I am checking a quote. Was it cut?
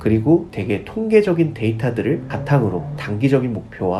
no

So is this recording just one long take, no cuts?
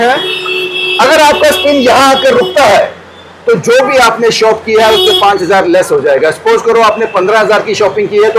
yes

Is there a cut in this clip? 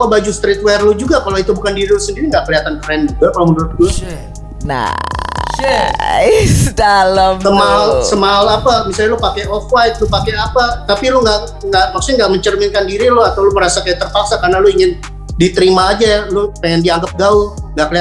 no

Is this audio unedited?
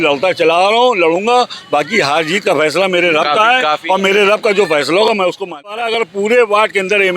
no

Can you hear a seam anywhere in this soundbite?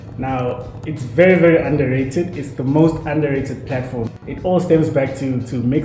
yes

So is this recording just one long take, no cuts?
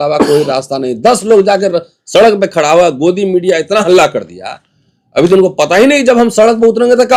yes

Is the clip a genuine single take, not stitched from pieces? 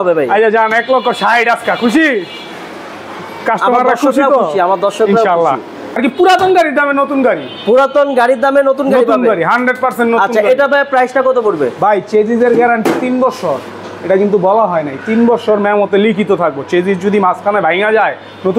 no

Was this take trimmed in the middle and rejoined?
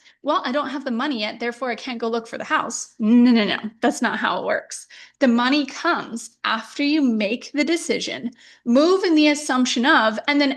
no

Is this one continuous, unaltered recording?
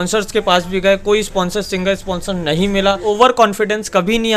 no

